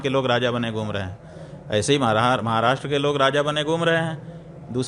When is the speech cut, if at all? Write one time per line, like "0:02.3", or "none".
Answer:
none

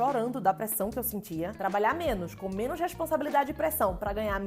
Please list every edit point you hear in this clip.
0:01.6

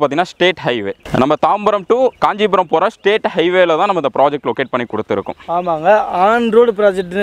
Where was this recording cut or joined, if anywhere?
none

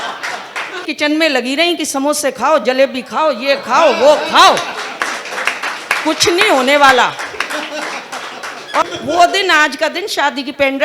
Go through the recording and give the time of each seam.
0:00.9
0:08.8

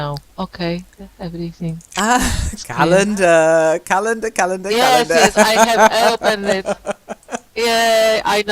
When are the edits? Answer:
0:02.3

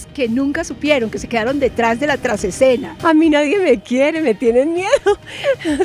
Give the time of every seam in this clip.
0:02.9

